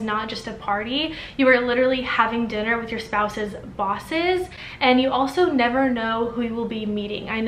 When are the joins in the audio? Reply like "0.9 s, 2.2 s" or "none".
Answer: none

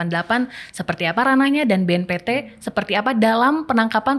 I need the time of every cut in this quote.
none

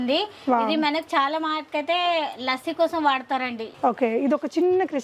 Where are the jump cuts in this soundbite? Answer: 3.7 s

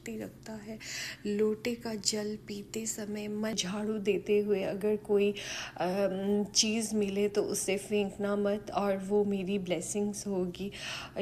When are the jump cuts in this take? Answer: 3.5 s

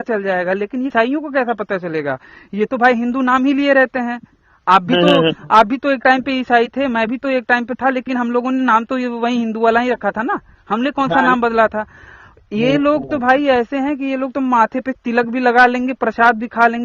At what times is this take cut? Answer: 0.9 s

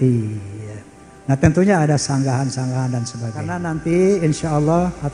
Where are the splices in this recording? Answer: 3.6 s

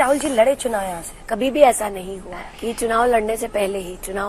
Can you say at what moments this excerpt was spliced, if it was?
1.2 s

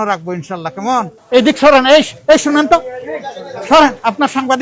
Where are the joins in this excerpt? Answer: 1.2 s

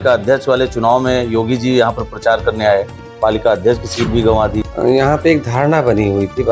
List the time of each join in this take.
4.6 s

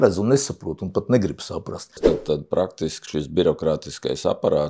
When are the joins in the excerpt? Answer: 2.1 s

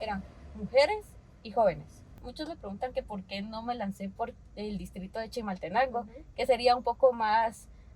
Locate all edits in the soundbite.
2.2 s

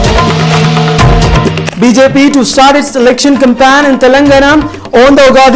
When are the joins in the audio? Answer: 1.6 s

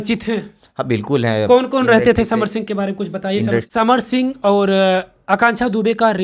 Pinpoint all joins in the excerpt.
3.7 s

